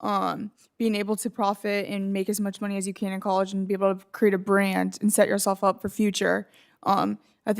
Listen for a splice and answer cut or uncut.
uncut